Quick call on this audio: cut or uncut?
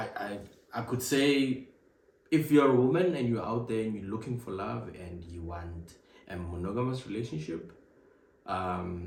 uncut